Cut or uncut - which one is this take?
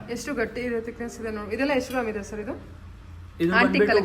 uncut